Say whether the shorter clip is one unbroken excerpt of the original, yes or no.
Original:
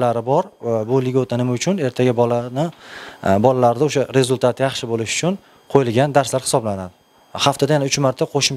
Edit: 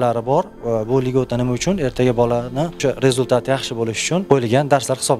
no